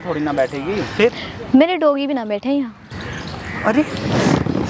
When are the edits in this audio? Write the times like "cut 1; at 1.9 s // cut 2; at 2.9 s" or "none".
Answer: cut 1; at 2.9 s